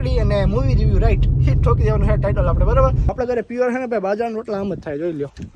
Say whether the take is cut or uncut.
cut